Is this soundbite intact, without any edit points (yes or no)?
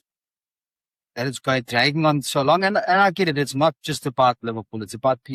yes